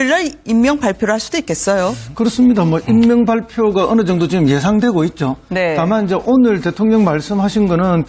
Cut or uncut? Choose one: uncut